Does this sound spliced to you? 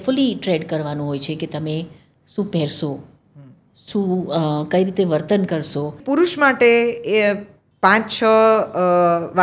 yes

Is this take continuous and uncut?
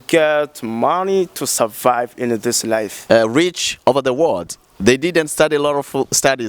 no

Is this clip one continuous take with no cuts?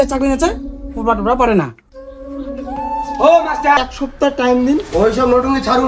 no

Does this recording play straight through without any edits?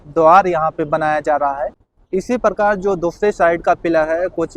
no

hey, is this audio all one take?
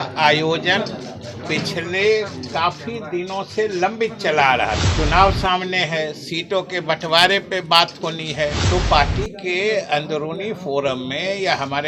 no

